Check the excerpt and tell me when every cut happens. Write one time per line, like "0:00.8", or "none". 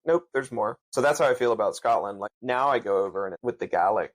0:00.8
0:02.3
0:03.4